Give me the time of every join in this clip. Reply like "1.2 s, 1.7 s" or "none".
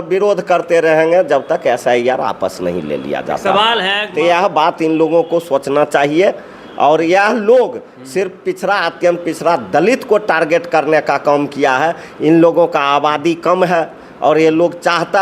4.0 s